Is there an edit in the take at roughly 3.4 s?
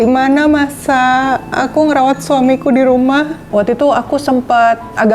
yes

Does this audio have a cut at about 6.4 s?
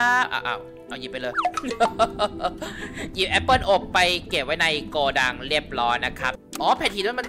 yes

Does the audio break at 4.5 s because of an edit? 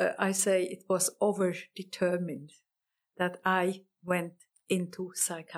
yes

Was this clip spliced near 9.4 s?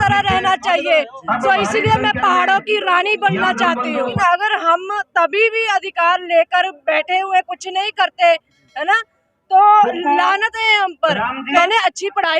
no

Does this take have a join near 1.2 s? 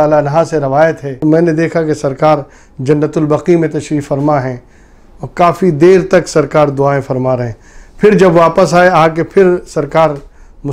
yes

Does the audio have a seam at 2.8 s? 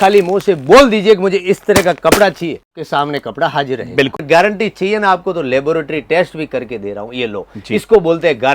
yes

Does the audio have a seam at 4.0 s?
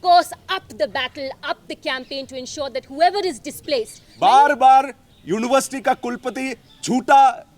yes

